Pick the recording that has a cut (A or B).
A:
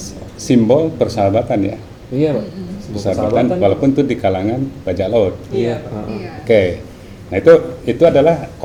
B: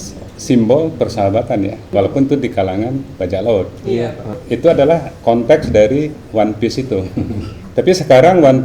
B